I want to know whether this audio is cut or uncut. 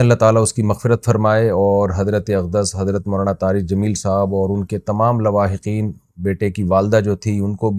uncut